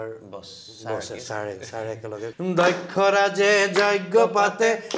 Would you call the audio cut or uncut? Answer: cut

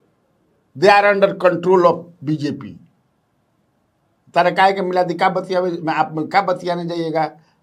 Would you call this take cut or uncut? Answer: uncut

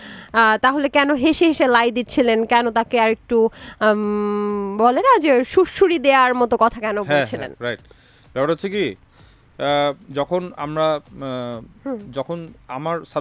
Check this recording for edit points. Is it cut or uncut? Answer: uncut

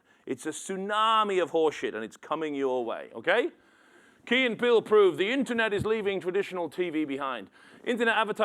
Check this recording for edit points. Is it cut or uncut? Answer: uncut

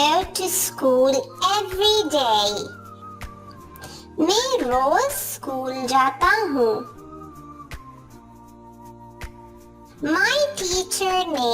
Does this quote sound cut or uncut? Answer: cut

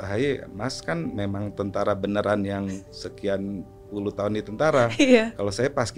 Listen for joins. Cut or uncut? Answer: uncut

